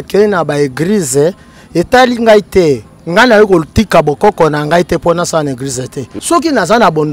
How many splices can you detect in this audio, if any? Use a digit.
1